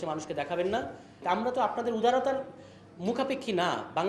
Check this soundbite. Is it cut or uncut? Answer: cut